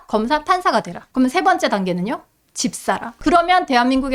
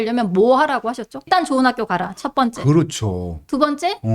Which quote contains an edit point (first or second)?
second